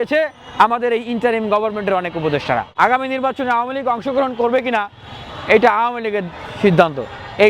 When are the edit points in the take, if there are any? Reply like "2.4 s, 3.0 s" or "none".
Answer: 2.7 s